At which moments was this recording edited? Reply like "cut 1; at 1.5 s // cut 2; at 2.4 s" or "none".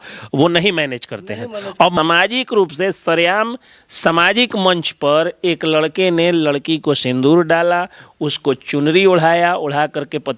cut 1; at 1.9 s